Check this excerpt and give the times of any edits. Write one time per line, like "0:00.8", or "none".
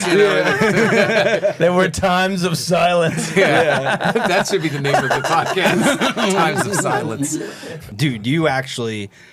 0:07.9